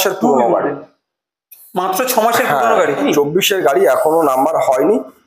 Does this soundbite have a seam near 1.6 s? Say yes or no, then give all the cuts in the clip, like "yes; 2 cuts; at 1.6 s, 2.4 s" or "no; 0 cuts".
no; 1 cut; at 3.0 s